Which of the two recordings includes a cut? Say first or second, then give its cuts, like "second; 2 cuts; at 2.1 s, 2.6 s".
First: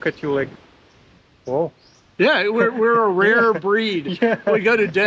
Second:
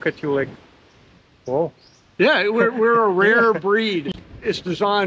second; 1 cut; at 4.1 s